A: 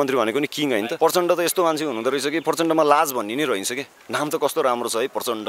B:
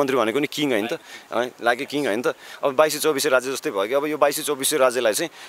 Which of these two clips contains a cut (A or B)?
A